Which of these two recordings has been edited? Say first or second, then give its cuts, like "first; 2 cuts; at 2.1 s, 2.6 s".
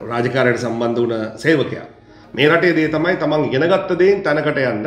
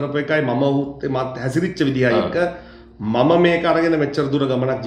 first; 1 cut; at 2.2 s